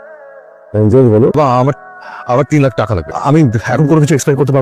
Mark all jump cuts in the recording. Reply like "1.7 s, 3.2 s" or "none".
1.4 s, 3.0 s